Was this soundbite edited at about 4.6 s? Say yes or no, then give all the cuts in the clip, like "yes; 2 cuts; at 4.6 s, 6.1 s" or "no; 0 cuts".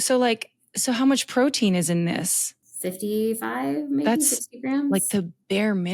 no; 1 cut; at 2.7 s